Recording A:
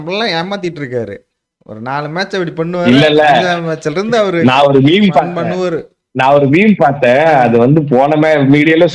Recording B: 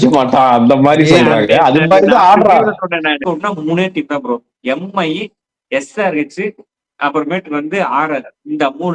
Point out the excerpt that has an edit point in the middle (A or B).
B